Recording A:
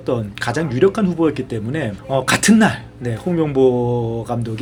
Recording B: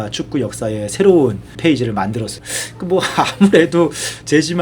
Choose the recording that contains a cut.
B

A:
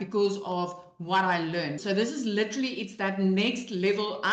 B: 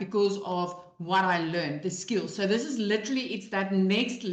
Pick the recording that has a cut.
A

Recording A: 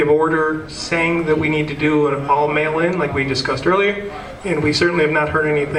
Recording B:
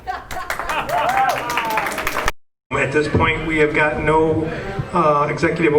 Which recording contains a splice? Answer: B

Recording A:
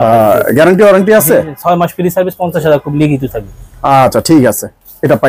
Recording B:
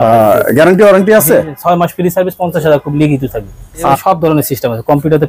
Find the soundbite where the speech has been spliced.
B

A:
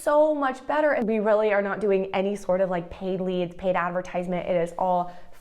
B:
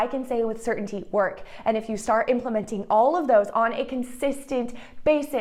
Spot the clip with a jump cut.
A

